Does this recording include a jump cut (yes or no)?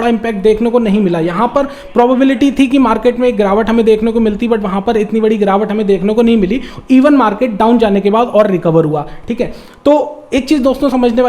no